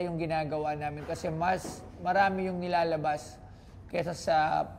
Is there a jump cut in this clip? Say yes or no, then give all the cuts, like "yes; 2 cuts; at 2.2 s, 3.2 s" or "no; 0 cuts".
no; 0 cuts